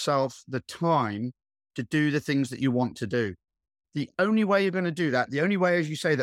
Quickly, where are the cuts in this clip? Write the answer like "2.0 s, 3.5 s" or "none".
3.8 s